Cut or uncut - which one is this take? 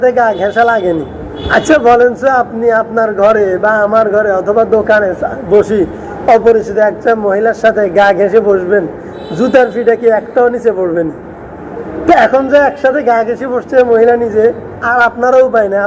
uncut